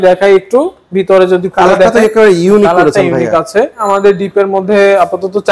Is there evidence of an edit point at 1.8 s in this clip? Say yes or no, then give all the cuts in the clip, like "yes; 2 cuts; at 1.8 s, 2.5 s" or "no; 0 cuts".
no; 1 cut; at 3.8 s